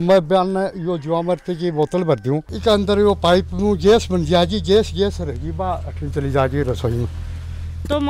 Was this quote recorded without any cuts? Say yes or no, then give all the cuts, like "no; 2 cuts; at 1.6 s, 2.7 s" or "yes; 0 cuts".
no; 1 cut; at 2.5 s